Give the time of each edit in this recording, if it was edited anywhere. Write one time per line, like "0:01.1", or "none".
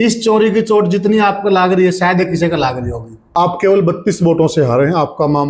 0:03.2